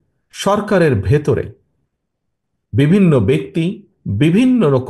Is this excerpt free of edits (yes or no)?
yes